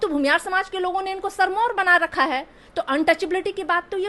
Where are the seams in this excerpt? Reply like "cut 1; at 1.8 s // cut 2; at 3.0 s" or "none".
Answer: none